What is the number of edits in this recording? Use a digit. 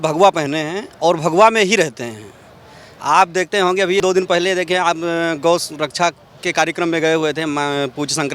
0